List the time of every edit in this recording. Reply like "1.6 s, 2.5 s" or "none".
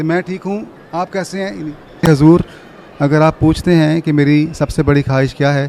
2.0 s